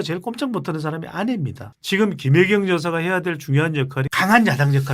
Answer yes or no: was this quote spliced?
yes